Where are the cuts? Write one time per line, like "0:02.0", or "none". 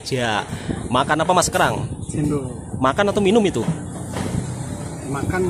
none